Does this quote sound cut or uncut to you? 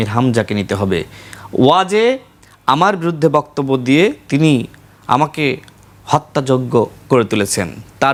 uncut